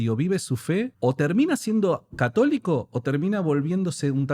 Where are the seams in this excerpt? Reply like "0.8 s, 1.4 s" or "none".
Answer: 0.9 s

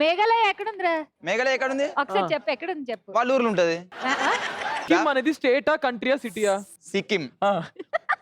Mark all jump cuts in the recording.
4.8 s

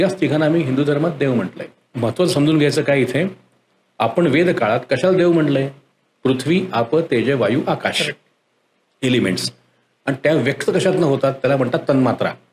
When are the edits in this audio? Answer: 1.9 s

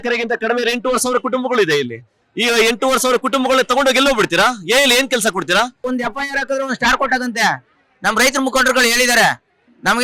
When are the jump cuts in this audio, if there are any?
5.9 s

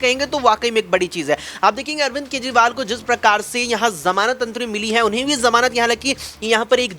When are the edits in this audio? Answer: none

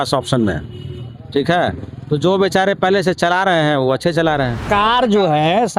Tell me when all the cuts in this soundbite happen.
4.7 s

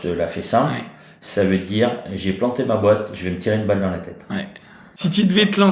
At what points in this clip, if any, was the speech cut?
4.8 s

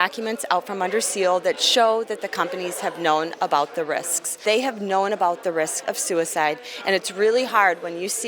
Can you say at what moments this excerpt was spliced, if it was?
4.3 s

